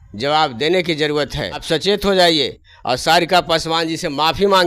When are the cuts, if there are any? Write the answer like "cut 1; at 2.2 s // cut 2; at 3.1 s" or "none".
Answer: cut 1; at 1.6 s